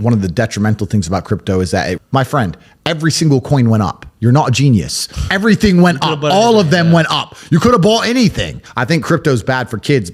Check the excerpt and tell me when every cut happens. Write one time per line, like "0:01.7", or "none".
0:02.0
0:08.6

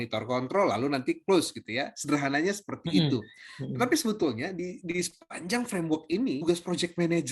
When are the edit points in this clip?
0:06.4

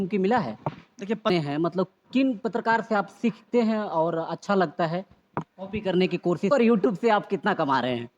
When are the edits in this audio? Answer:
0:01.3
0:06.5

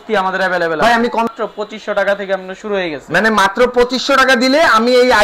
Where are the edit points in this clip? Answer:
0:01.3

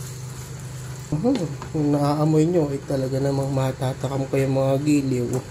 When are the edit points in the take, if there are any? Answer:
0:01.1

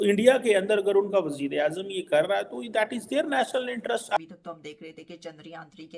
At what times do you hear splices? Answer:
0:04.2

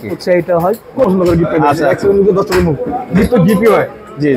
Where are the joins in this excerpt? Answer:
0:01.1

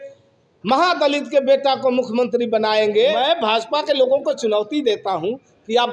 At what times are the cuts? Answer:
0:03.2

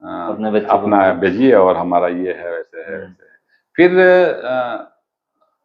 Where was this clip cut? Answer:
none

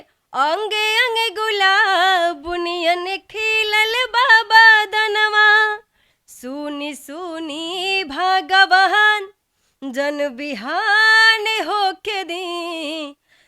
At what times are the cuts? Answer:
none

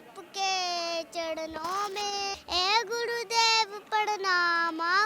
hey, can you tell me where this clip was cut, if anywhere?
0:02.3

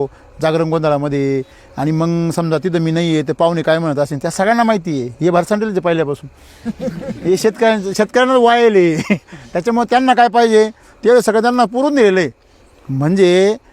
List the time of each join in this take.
none

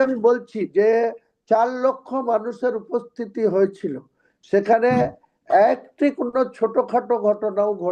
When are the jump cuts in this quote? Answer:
none

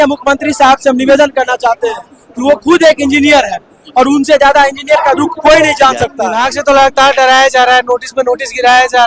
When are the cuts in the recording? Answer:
0:06.3

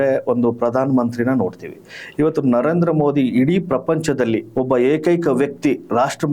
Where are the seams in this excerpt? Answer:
0:04.5

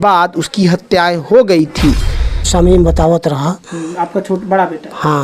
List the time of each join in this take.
0:02.5

